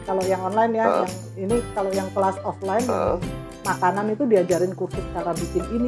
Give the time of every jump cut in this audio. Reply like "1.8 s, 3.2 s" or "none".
none